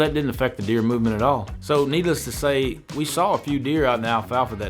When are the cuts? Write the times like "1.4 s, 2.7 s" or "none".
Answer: none